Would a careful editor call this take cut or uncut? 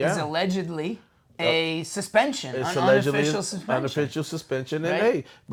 uncut